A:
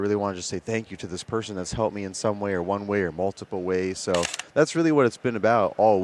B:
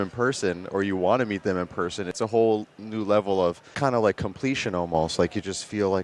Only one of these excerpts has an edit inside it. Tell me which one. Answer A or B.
B